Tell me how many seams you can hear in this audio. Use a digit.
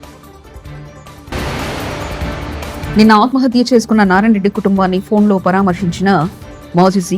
2